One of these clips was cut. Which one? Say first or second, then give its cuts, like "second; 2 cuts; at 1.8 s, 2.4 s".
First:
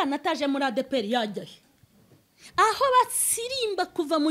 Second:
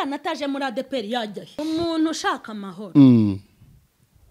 second; 1 cut; at 1.5 s